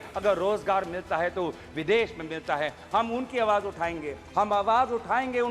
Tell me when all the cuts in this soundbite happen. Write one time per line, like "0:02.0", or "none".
0:04.2